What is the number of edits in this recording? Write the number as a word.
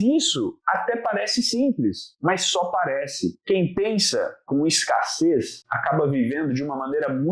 one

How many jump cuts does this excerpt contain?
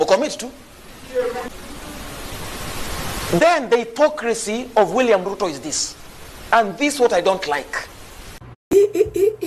one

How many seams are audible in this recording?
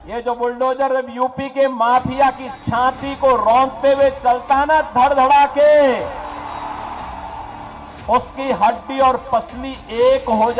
zero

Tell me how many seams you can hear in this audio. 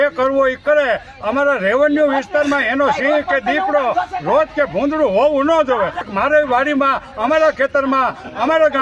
one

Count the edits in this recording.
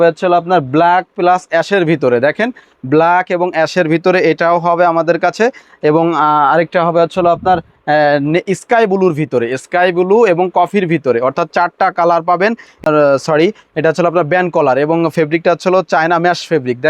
one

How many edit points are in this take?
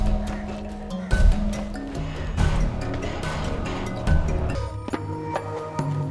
one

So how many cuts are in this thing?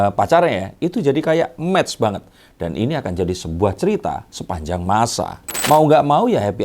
one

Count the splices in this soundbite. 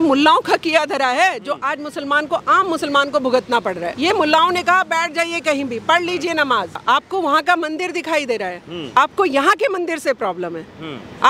two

